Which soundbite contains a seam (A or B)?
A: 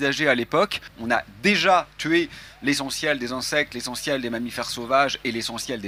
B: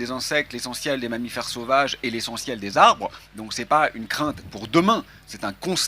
A